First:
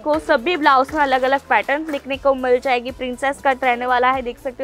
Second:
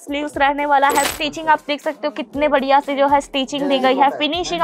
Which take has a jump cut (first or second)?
second